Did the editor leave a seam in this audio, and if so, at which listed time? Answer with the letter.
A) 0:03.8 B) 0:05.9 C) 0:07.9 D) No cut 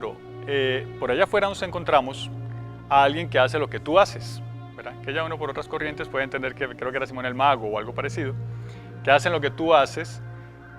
C